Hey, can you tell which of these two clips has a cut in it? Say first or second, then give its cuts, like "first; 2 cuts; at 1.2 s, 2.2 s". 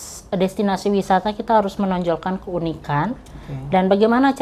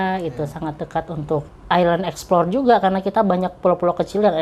second; 1 cut; at 1.5 s